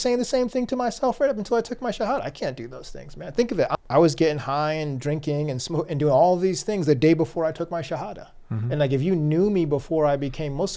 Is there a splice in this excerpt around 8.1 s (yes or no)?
no